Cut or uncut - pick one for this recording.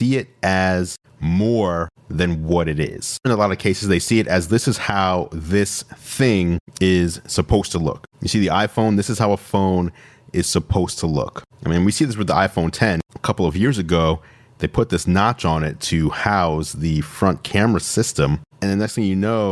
cut